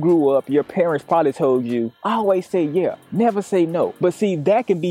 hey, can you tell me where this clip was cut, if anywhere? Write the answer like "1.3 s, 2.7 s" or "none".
3.9 s